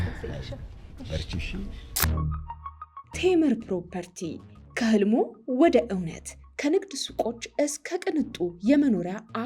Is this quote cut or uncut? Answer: cut